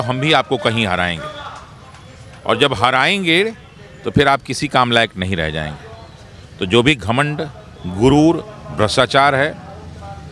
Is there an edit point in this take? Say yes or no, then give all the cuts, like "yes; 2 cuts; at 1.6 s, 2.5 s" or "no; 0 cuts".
no; 0 cuts